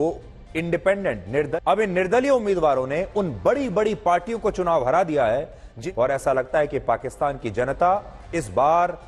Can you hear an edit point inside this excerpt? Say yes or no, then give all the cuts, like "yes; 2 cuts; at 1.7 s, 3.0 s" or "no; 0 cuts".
yes; 2 cuts; at 1.5 s, 5.8 s